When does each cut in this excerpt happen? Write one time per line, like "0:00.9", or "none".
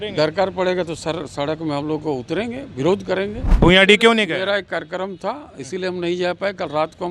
0:03.4

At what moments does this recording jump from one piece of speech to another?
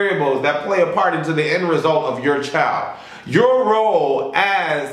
none

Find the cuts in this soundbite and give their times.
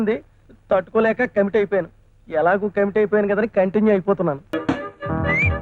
0:04.5

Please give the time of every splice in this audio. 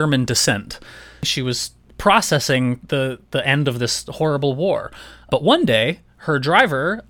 0:01.3
0:05.3

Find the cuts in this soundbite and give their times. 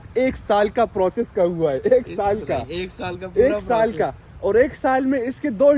none

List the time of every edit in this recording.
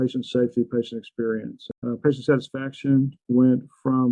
0:01.7

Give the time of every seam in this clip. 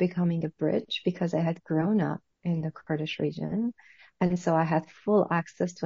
none

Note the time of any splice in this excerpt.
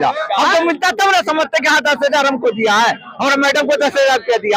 none

